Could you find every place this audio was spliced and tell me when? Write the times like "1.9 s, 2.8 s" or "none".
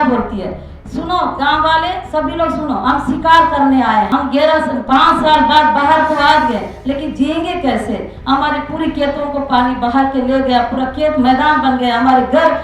4.1 s